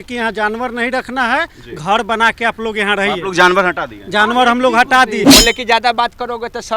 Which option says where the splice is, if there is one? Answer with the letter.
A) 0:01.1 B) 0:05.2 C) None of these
B